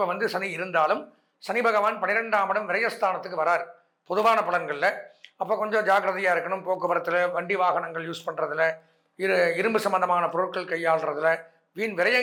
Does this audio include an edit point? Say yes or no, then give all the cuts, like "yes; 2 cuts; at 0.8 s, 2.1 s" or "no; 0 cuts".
no; 0 cuts